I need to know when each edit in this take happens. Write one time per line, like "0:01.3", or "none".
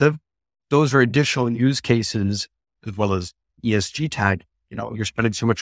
0:03.5

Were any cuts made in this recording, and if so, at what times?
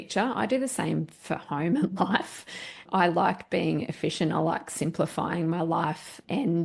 none

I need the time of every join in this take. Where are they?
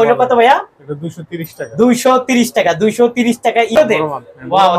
0:03.8

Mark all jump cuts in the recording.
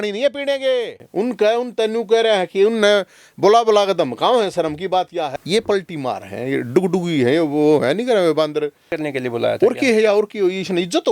0:01.0
0:05.3
0:09.0

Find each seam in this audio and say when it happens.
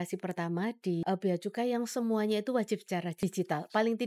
0:01.0
0:03.2

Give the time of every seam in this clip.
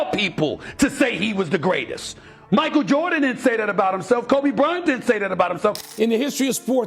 0:05.8

